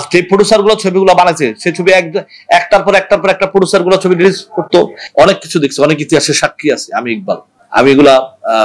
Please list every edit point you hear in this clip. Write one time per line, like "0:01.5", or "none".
0:05.0